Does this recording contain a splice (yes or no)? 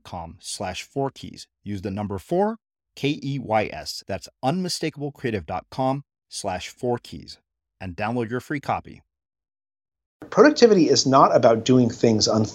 yes